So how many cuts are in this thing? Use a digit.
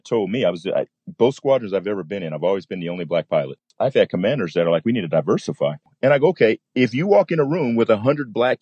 1